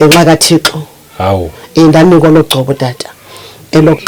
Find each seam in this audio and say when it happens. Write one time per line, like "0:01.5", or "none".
none